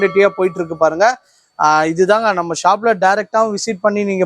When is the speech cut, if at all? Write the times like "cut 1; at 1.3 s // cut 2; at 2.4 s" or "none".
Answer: none